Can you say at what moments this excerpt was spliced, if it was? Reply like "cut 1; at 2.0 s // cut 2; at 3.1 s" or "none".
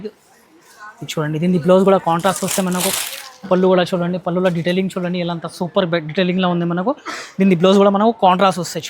none